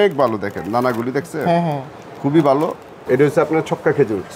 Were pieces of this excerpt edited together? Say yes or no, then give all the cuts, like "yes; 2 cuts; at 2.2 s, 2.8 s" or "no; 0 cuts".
yes; 1 cut; at 2.9 s